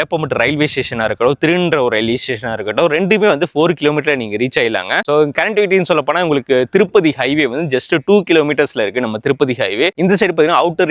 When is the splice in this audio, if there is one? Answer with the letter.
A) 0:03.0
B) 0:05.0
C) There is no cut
C